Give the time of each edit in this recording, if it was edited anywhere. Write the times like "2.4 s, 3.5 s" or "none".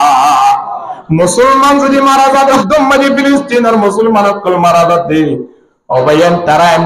2.6 s

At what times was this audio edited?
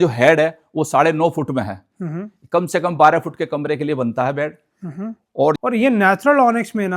5.6 s

